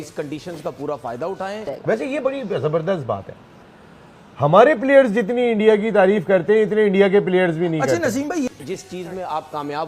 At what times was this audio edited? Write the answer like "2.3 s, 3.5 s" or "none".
1.7 s, 8.5 s